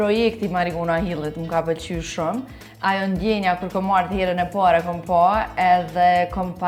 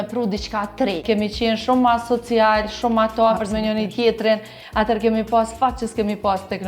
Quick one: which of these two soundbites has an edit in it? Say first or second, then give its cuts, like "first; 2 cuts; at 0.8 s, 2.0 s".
second; 1 cut; at 1.0 s